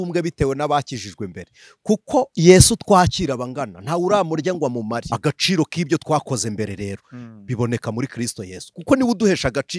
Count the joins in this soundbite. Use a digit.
1